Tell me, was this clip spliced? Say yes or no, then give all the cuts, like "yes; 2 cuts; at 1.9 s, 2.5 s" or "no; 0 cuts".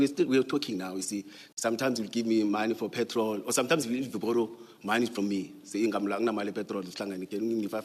no; 0 cuts